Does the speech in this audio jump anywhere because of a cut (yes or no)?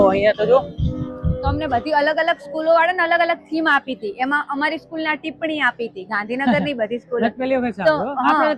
yes